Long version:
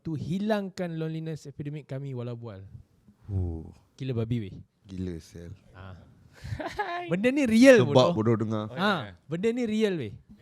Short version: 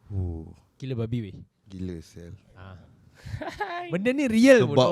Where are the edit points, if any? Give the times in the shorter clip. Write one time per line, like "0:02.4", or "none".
none